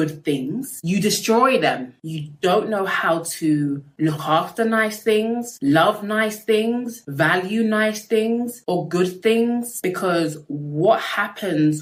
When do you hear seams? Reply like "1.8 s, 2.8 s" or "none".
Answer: none